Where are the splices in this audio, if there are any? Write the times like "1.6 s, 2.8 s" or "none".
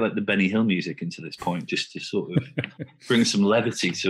none